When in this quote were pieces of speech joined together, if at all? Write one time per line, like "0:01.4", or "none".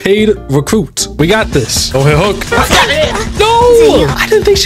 0:01.1